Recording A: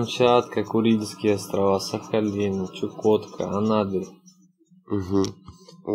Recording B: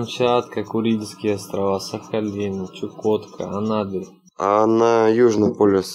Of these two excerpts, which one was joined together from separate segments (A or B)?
B